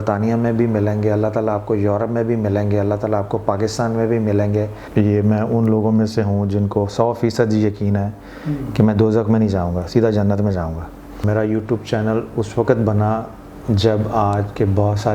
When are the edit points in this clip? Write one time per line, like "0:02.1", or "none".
0:04.8
0:11.2